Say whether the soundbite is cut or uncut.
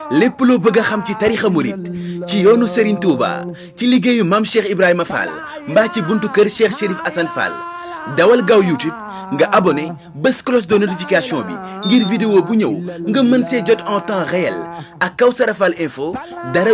cut